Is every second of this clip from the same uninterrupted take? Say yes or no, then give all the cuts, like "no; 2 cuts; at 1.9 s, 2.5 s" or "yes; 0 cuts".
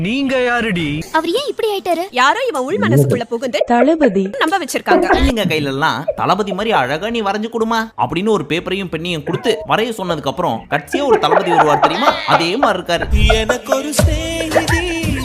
no; 1 cut; at 5.2 s